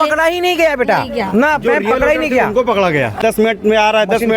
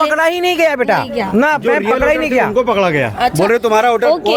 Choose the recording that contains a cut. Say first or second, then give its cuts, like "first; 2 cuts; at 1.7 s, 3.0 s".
first; 1 cut; at 3.2 s